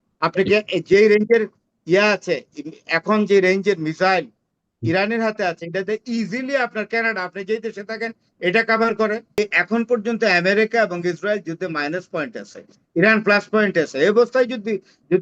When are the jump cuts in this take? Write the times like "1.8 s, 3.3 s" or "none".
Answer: 9.4 s

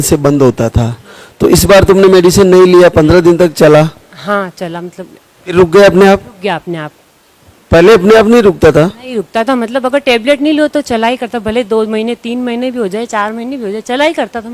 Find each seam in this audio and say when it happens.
none

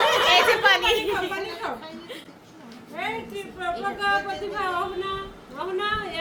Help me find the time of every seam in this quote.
none

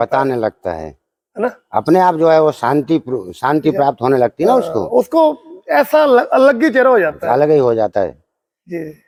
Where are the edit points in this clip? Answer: none

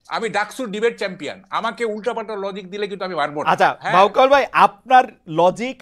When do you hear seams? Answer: none

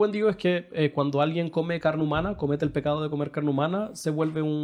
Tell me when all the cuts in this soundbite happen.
none

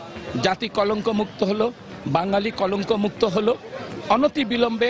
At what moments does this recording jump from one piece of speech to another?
none

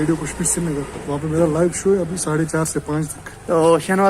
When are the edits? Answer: 1.0 s

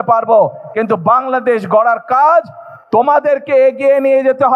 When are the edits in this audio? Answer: none

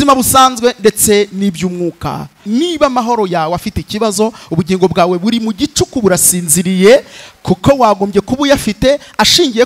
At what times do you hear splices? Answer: 2.4 s

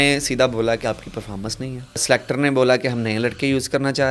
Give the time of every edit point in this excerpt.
2.0 s

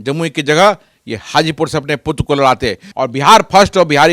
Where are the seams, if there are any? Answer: 2.8 s

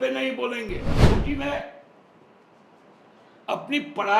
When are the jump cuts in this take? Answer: 1.0 s

